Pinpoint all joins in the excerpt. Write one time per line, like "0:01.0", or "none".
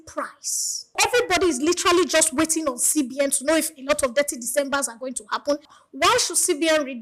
0:01.0
0:05.7